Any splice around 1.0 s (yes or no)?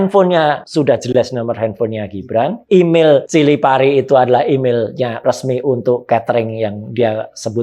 yes